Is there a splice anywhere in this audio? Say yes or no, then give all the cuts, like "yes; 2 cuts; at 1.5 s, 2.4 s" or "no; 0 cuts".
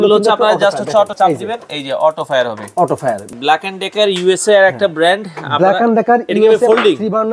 yes; 2 cuts; at 1.1 s, 3.3 s